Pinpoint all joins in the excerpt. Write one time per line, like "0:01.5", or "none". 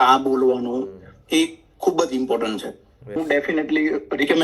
0:03.2